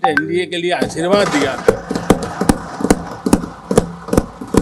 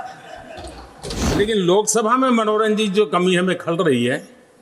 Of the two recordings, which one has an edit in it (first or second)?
second